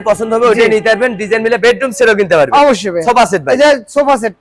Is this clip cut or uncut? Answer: uncut